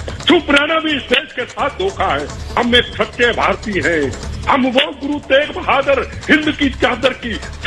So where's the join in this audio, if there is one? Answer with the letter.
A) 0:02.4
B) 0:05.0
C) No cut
A